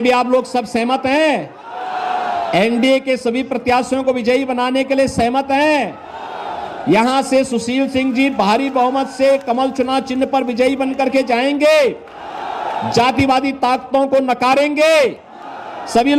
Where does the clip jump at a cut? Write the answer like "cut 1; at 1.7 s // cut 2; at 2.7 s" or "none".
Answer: none